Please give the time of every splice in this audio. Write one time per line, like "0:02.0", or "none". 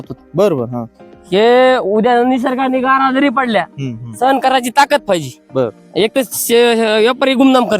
0:05.8